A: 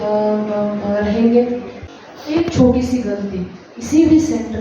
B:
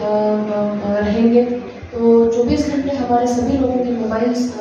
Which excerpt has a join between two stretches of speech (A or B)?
A